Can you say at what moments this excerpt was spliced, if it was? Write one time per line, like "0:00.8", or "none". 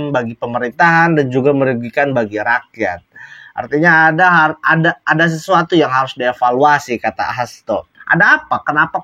0:08.0